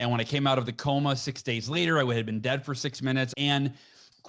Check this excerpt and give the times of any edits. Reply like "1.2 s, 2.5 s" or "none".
3.3 s